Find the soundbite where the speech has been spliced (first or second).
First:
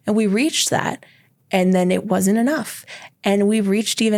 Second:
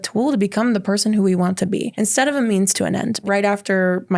second